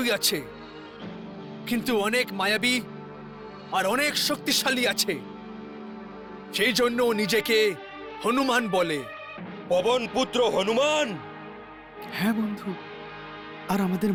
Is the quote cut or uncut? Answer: uncut